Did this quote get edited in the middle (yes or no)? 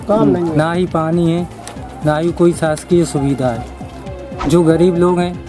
yes